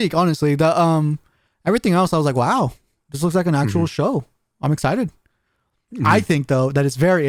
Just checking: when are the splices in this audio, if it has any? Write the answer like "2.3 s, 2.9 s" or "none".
none